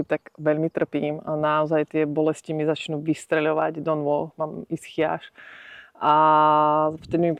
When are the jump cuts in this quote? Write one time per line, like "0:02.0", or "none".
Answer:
none